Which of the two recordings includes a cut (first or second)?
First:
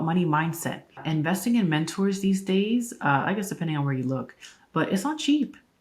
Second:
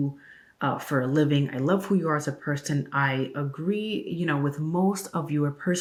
first